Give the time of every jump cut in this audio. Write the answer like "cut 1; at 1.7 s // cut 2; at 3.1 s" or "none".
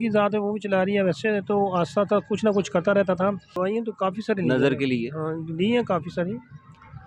cut 1; at 3.5 s